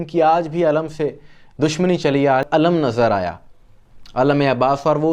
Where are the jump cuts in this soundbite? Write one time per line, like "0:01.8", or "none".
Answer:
0:02.4